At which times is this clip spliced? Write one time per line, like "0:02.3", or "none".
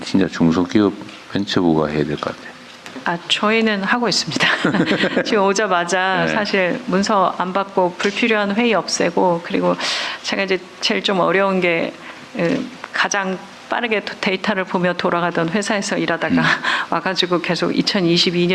none

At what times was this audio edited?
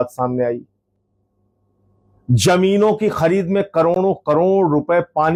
none

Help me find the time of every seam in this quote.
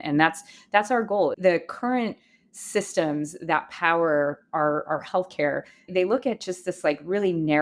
0:01.3
0:05.9

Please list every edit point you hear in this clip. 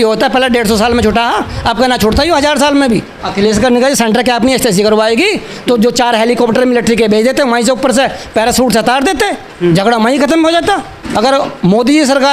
0:03.2
0:11.1

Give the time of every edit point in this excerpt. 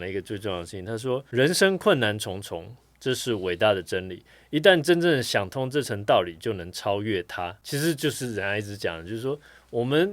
0:01.3
0:07.6

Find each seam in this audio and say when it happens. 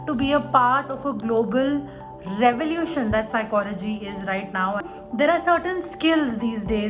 0:04.9

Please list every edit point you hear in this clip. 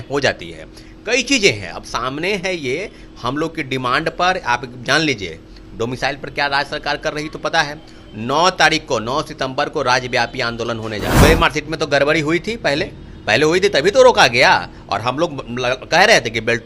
0:11.2

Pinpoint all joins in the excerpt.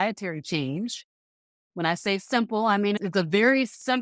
0:03.0

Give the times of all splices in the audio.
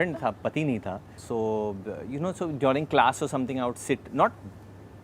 none

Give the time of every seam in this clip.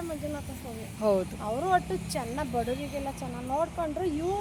none

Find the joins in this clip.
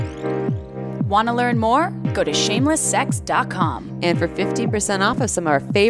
0:01.1

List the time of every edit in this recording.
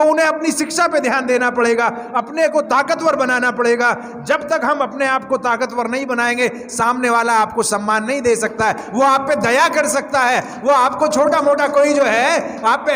none

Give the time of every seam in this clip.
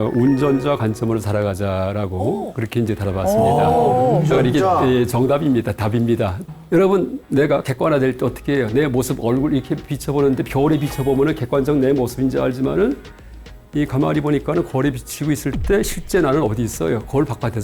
0:06.4

